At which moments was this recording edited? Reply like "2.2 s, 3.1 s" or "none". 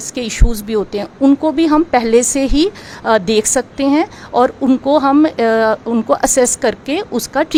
none